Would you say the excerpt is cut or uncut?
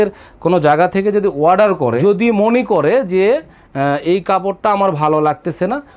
cut